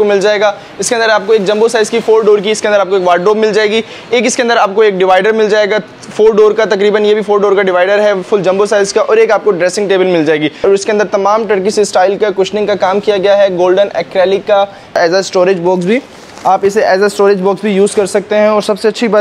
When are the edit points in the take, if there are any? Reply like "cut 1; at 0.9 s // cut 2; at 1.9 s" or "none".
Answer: cut 1; at 10.6 s // cut 2; at 15.0 s